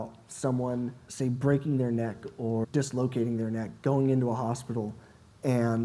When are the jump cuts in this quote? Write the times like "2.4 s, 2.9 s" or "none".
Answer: 1.0 s, 2.6 s